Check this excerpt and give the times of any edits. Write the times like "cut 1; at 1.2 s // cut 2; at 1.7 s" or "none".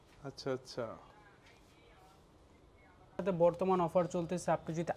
cut 1; at 3.2 s